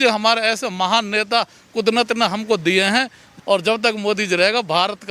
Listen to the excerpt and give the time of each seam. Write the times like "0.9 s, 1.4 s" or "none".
3.3 s